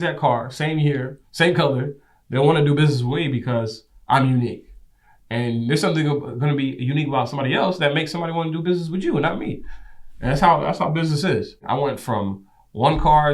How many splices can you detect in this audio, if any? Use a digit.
1